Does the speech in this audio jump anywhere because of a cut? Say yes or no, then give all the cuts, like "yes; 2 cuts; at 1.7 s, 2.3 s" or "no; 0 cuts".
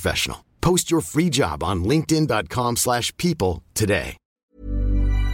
yes; 1 cut; at 4.2 s